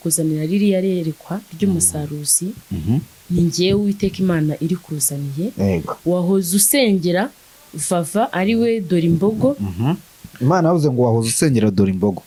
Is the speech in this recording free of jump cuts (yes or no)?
yes